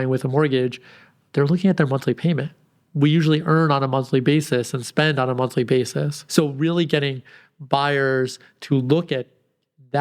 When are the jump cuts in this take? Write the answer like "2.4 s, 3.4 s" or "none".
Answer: 6.2 s